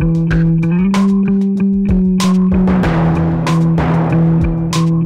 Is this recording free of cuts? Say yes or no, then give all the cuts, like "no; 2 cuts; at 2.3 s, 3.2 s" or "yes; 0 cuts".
yes; 0 cuts